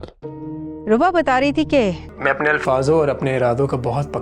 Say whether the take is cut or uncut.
cut